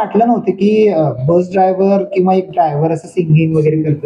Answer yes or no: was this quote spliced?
no